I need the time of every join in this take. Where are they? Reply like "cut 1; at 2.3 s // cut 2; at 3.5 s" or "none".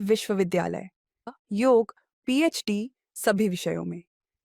cut 1; at 1.3 s